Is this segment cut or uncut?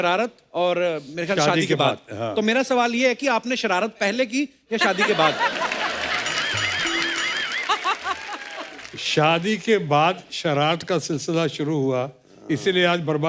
uncut